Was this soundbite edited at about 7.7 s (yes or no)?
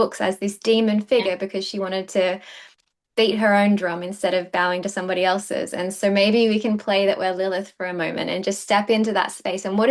no